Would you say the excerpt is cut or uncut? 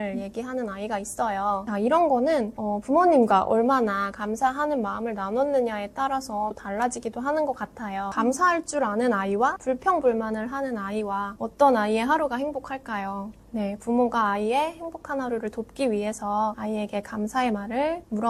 uncut